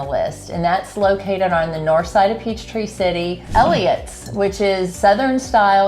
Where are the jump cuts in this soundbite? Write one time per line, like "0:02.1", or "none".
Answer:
0:03.4
0:04.9